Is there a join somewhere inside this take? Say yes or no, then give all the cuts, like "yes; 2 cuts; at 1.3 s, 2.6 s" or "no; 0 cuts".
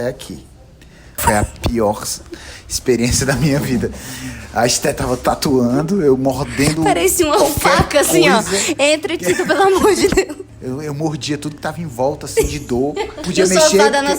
yes; 3 cuts; at 1.2 s, 10.5 s, 13.2 s